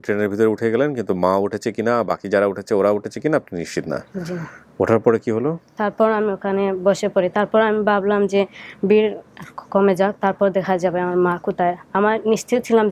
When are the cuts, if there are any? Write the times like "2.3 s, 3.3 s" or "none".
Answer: none